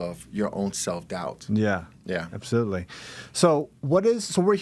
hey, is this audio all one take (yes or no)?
yes